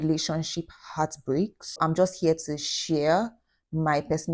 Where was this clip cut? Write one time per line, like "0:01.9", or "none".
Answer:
0:01.7